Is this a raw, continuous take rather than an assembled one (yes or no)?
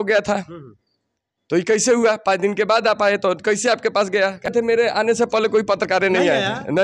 no